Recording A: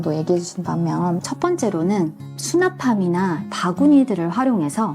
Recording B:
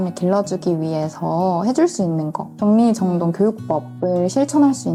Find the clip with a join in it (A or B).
A